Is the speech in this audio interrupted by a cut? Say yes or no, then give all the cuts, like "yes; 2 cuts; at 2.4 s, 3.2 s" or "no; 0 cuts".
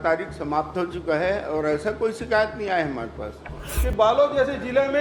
yes; 1 cut; at 3.6 s